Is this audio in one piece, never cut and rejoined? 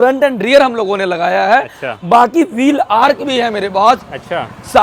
yes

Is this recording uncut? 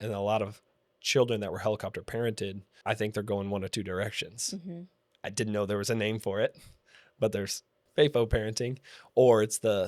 no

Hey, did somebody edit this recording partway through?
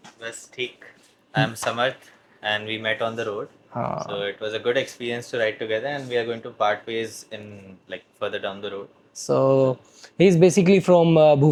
no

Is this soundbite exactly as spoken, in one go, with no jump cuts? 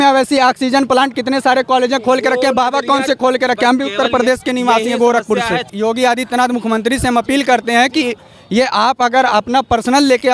no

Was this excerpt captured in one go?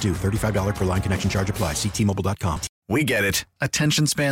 no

